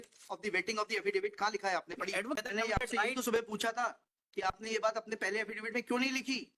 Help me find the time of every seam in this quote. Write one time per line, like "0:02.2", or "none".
0:02.4